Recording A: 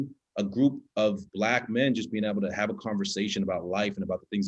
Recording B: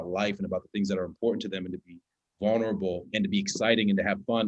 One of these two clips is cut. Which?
B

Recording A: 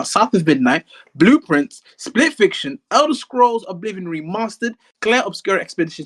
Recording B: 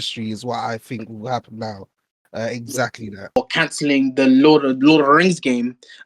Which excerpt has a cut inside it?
B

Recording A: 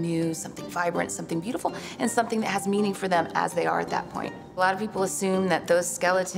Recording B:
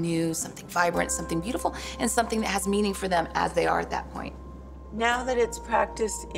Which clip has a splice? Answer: B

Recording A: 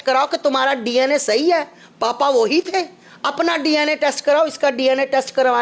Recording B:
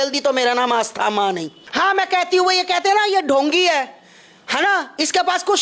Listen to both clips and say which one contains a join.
B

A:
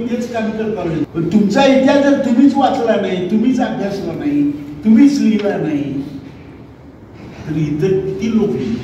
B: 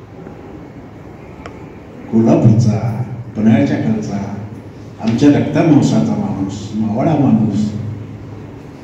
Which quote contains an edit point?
A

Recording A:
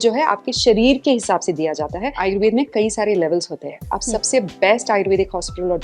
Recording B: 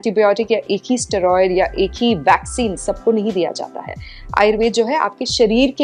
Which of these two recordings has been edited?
A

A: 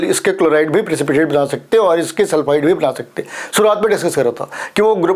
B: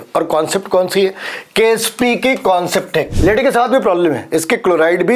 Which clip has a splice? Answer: B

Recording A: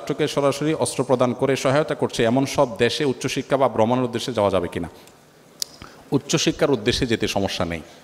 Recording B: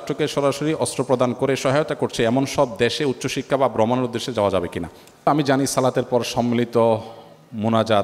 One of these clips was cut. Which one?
B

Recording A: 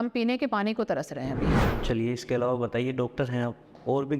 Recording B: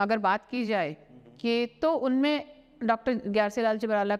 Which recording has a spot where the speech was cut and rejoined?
A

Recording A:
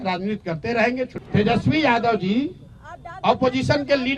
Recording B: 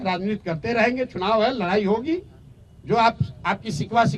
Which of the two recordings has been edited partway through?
A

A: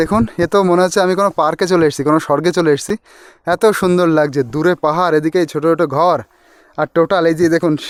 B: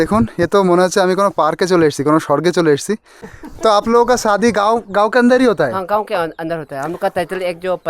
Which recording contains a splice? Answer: B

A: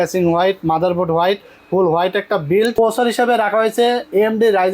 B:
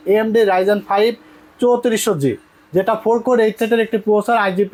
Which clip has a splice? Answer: A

